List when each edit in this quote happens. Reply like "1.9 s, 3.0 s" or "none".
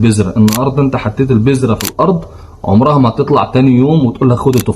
none